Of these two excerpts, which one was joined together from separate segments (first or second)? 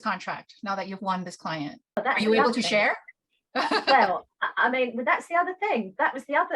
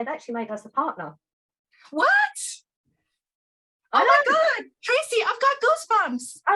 first